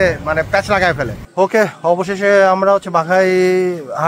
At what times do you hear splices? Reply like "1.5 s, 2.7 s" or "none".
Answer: 1.2 s